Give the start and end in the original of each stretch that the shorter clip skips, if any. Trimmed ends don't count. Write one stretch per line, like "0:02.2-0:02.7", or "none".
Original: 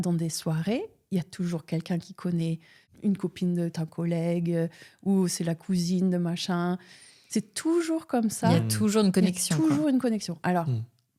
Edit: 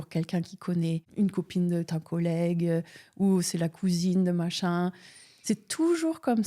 0:02.6-0:02.9